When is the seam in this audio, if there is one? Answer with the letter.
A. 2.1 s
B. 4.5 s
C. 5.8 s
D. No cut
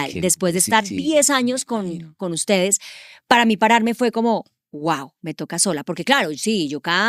D